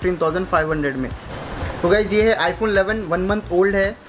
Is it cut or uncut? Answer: cut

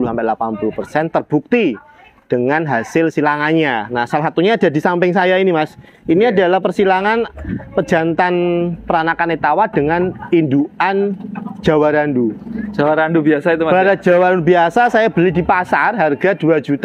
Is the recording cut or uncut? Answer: uncut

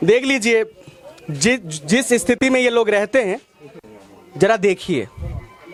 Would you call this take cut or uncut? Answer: uncut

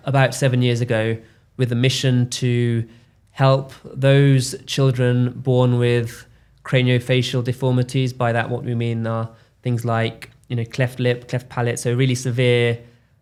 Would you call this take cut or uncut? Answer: uncut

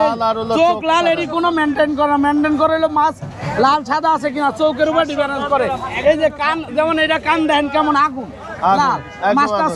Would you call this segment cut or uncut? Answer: uncut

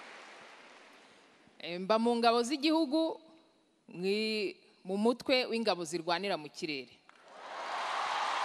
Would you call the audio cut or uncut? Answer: uncut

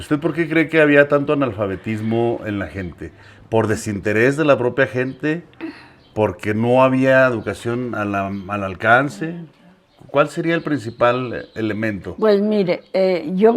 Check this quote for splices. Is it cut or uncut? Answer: uncut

